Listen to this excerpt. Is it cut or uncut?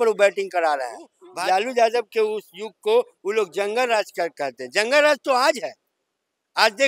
cut